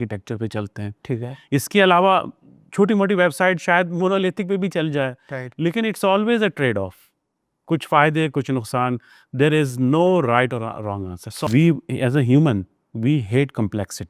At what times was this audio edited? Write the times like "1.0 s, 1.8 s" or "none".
11.5 s